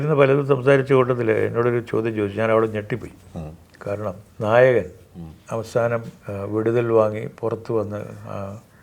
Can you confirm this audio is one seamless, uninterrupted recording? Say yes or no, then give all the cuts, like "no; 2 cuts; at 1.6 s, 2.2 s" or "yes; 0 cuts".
no; 2 cuts; at 4.3 s, 6.2 s